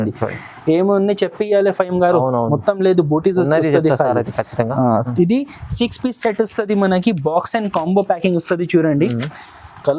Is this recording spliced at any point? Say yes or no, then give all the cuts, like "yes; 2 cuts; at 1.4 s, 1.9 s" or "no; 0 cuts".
no; 0 cuts